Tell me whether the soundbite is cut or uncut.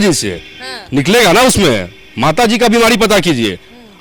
uncut